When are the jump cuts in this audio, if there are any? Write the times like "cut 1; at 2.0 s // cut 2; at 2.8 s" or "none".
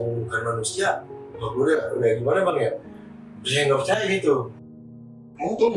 cut 1; at 4.7 s